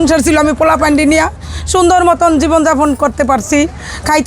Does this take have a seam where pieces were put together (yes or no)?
no